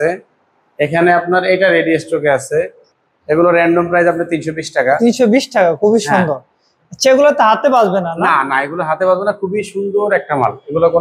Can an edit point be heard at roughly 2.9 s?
yes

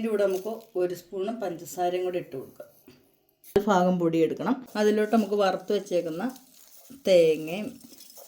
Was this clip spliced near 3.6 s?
yes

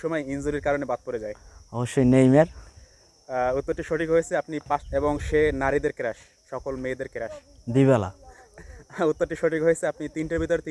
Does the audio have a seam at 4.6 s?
yes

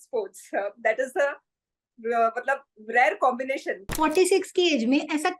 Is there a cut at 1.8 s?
no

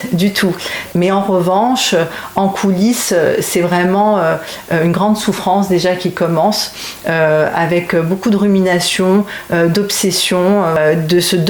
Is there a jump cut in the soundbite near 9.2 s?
no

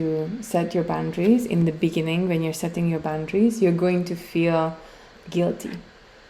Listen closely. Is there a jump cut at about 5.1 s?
yes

